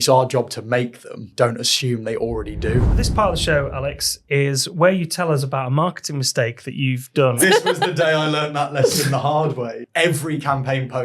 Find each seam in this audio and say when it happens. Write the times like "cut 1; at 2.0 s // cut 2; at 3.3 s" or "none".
cut 1; at 1.2 s // cut 2; at 3.0 s // cut 3; at 7.4 s // cut 4; at 9.8 s